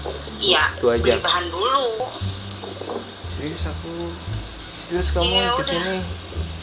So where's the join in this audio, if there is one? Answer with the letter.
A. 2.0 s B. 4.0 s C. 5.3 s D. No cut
A